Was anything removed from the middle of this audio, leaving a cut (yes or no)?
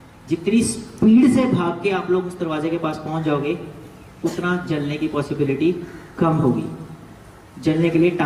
no